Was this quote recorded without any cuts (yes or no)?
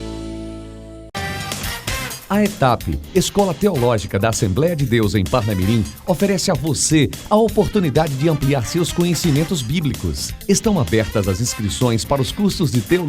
no